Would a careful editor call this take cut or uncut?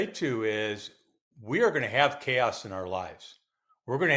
uncut